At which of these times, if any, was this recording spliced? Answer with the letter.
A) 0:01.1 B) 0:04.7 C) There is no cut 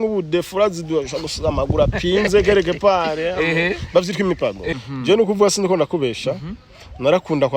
B